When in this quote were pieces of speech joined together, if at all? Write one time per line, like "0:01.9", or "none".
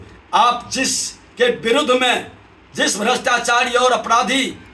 none